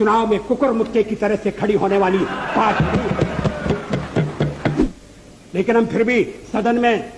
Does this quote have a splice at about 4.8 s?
yes; 1 cut; at 4.8 s

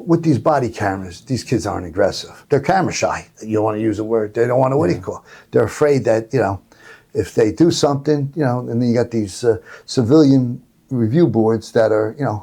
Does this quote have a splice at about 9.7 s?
no; 1 cut; at 2.3 s

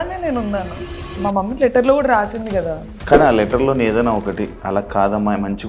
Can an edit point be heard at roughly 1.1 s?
no; 1 cut; at 2.8 s

